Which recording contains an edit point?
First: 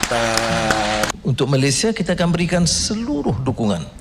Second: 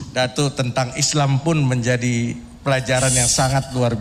first; 1 cut; at 1.1 s

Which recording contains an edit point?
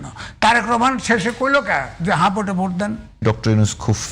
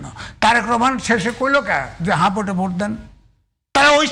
first; 1 cut; at 3.1 s

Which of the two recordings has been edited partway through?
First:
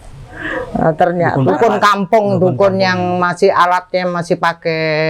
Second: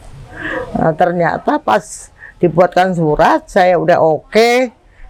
first; 1 cut; at 1.3 s

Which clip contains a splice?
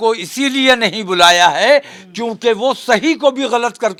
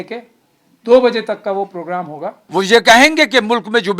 second; 1 cut; at 2.4 s

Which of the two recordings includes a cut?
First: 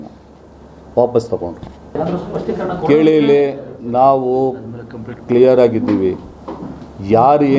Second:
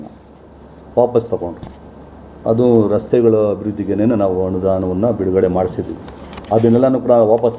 first; 1 cut; at 1.9 s

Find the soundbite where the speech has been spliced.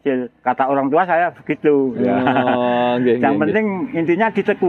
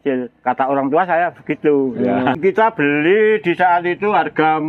second; 1 cut; at 2.3 s

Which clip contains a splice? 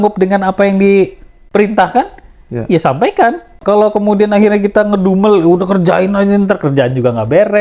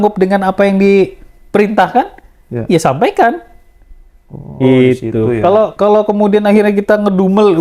first; 1 cut; at 3.6 s

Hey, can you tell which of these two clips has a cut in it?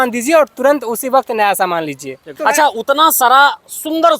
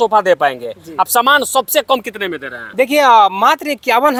first; 1 cut; at 2.3 s

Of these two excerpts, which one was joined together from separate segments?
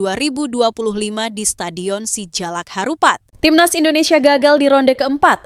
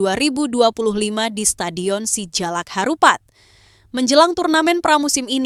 first; 1 cut; at 3.3 s

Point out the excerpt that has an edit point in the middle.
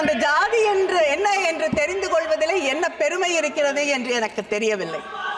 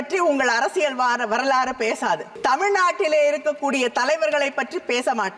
second; 1 cut; at 2.3 s

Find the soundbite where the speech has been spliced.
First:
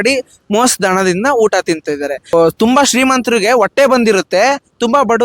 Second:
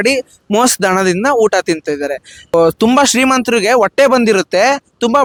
first; 1 cut; at 2.1 s

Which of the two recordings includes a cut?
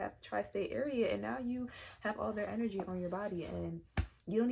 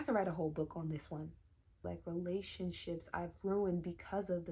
second; 1 cut; at 1.8 s

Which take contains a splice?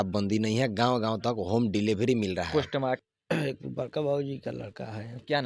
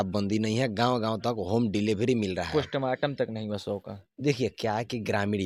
first; 1 cut; at 3.0 s

